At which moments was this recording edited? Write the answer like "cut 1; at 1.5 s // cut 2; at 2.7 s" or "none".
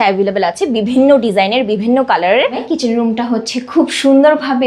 cut 1; at 2.6 s